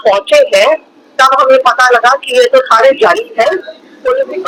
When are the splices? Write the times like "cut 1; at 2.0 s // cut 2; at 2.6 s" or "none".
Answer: none